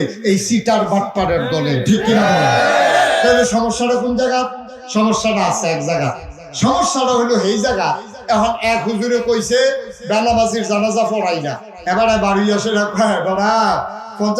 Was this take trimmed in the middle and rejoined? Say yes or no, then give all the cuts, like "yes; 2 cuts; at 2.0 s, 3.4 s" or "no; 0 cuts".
yes; 1 cut; at 3.2 s